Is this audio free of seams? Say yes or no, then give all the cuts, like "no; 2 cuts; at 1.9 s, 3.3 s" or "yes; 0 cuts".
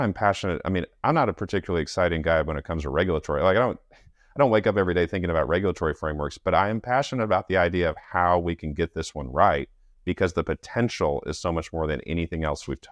yes; 0 cuts